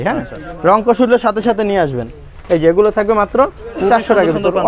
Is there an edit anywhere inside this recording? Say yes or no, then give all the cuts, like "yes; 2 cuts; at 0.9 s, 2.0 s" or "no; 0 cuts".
no; 0 cuts